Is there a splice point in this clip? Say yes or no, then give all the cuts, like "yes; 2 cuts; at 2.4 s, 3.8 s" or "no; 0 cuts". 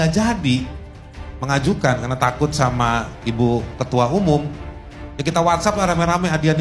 no; 0 cuts